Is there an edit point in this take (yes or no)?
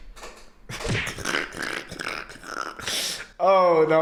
no